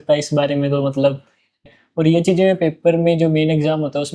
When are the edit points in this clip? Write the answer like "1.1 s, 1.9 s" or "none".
1.6 s

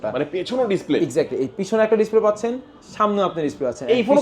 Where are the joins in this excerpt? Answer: none

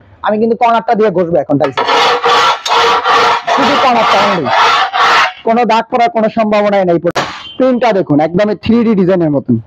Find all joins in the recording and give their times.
7.1 s

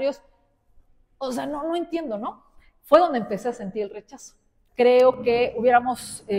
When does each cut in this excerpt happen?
4.5 s

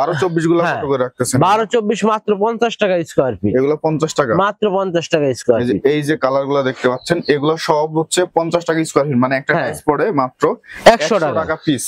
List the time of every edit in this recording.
none

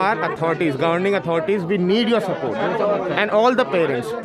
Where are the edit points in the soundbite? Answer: none

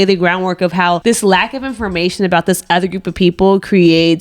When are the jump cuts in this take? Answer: 1.0 s

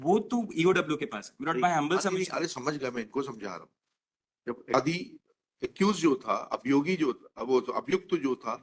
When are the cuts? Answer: 4.7 s

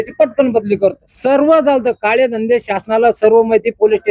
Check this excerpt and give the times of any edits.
1.1 s

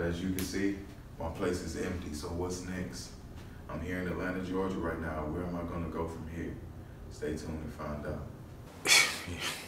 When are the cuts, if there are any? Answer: 8.3 s

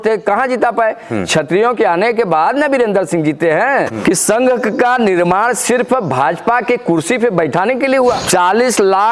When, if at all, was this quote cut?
3.9 s, 8.2 s

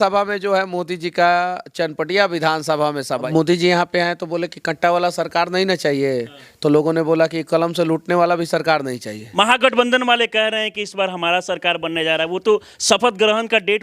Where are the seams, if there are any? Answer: 3.3 s, 9.2 s

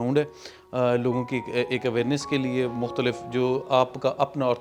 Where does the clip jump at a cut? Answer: none

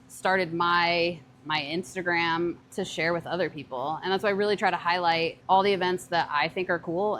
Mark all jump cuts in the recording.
2.6 s, 5.4 s

